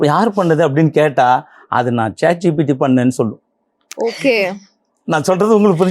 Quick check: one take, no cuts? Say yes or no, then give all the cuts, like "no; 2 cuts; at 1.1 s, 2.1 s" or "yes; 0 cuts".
yes; 0 cuts